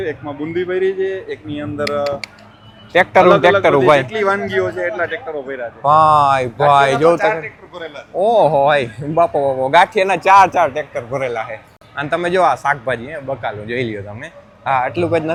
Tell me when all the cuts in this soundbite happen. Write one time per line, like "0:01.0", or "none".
none